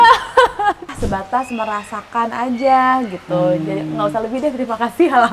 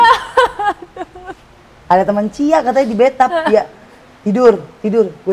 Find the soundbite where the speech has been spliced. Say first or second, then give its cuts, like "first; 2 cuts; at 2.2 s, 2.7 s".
first; 1 cut; at 1.0 s